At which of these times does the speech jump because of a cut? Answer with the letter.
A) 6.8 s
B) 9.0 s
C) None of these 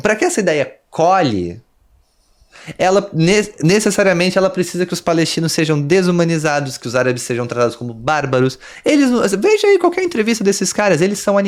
C